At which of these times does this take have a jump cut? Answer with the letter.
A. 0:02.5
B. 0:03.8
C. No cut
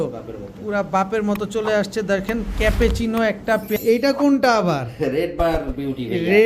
B